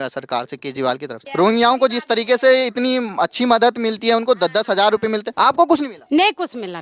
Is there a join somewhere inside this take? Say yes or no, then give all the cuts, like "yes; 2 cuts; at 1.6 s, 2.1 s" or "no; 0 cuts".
yes; 3 cuts; at 1.2 s, 5.3 s, 6.0 s